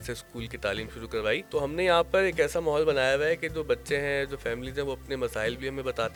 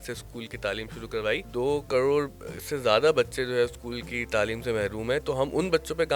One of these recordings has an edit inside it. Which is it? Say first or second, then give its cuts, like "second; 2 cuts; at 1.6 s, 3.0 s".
second; 1 cut; at 1.4 s